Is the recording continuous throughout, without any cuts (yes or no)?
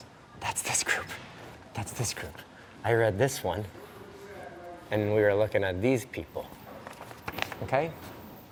yes